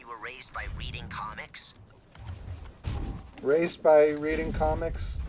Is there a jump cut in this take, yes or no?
no